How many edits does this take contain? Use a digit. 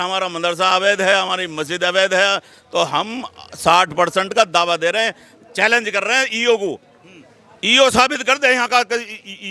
0